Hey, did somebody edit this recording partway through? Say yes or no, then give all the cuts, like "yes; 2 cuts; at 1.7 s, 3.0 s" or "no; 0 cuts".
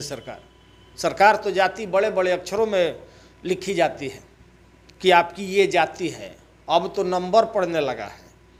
no; 0 cuts